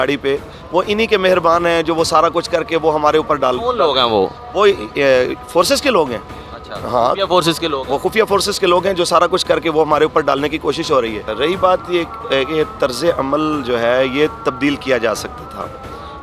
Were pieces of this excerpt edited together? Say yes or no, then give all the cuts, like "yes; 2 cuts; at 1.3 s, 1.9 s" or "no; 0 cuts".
no; 0 cuts